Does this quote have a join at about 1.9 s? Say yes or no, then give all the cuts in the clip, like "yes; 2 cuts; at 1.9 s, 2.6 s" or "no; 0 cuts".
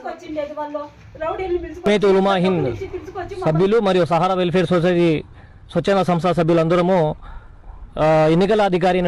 yes; 1 cut; at 1.9 s